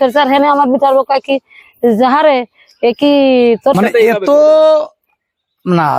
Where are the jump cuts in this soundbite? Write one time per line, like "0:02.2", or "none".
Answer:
0:03.7